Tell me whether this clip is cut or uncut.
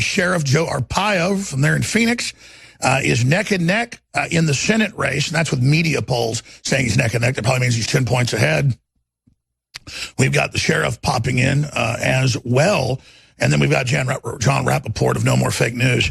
uncut